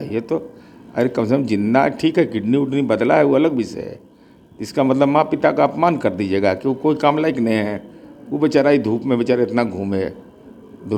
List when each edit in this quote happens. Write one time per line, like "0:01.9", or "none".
none